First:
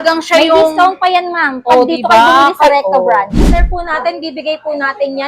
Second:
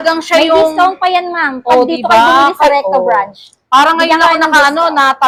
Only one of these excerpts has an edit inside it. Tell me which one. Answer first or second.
first